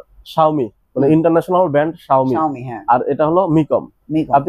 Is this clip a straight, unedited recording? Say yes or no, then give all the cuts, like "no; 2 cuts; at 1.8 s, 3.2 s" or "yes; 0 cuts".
yes; 0 cuts